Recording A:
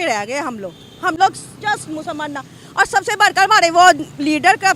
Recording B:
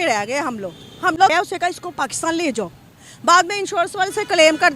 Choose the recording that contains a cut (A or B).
B